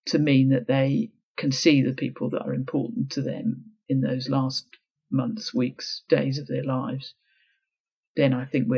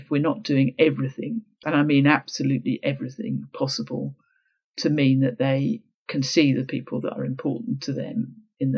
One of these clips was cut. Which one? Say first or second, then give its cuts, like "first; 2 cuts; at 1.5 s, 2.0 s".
second; 1 cut; at 1.5 s